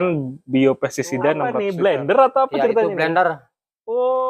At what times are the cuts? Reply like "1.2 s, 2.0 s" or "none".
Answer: 1.6 s

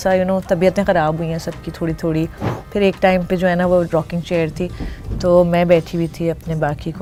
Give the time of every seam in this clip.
none

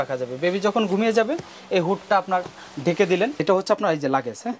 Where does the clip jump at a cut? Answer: 3.4 s

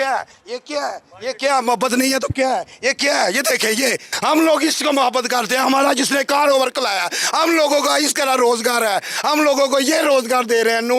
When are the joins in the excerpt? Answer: none

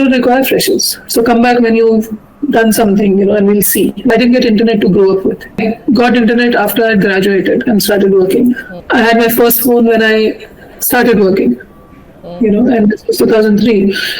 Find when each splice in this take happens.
4.1 s, 5.6 s, 8.7 s

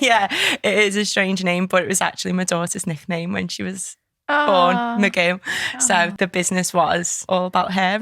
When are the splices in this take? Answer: 6.1 s, 7.1 s

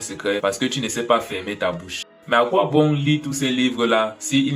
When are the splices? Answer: 2.1 s

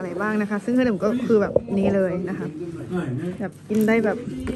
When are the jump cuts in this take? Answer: none

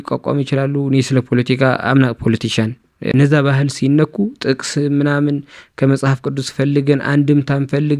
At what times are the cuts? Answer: 3.1 s

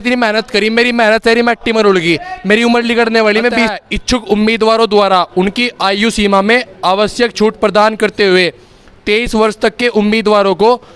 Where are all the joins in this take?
3.7 s

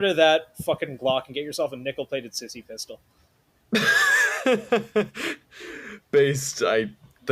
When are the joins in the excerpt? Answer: none

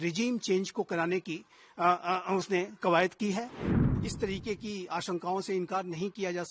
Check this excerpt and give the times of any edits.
3.7 s

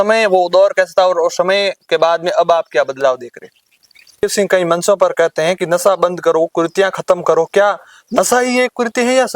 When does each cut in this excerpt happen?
4.2 s

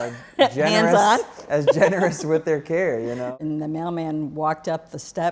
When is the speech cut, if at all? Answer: 3.4 s

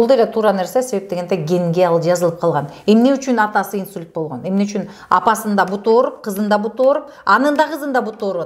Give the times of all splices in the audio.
none

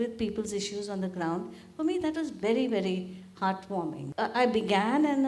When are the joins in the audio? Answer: 4.0 s

